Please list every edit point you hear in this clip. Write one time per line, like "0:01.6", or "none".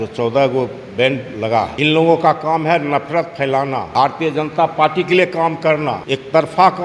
0:01.7
0:03.9
0:06.0